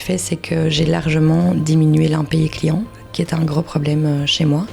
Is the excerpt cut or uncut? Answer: uncut